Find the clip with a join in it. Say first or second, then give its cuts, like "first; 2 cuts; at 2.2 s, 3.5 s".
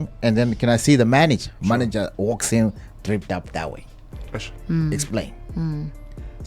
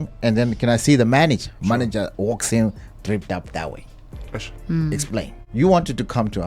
second; 1 cut; at 5.4 s